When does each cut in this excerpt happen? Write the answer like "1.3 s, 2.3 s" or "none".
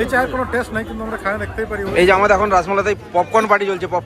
1.9 s

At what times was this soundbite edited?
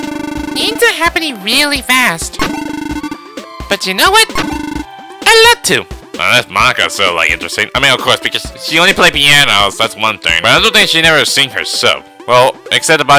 10.3 s

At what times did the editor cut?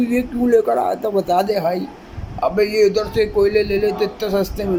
none

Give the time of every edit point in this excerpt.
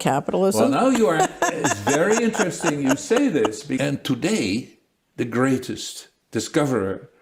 3.8 s

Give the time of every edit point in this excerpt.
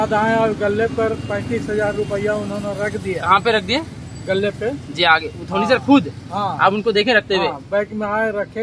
none

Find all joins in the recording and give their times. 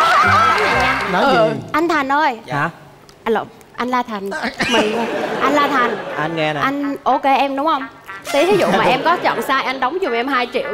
0.9 s

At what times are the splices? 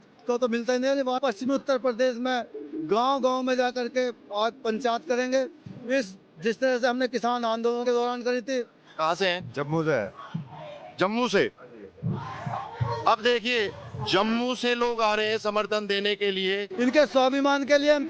1.2 s, 8.8 s, 16.7 s

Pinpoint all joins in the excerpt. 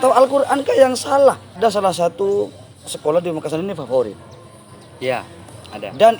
1.6 s

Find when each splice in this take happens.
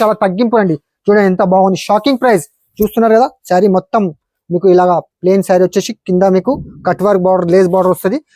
none

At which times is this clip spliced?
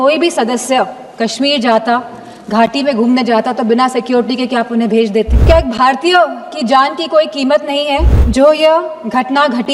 5.4 s, 8.2 s

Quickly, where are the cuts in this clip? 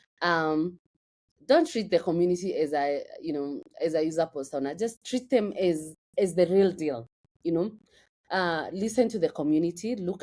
none

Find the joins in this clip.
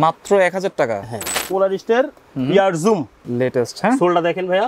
1.5 s, 3.2 s

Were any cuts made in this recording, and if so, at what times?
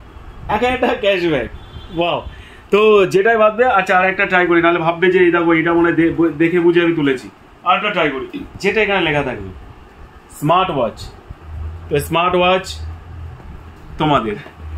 none

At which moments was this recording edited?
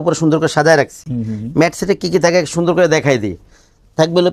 none

